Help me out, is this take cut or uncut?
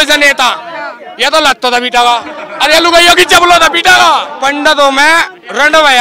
cut